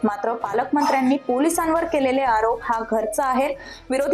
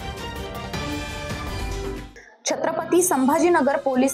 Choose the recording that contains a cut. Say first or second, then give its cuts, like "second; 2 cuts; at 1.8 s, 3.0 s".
second; 1 cut; at 2.0 s